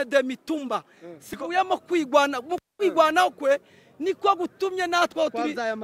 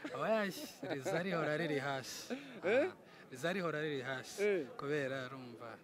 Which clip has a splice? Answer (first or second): first